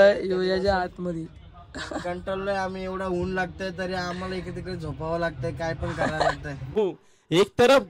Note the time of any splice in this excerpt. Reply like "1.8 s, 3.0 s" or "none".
6.8 s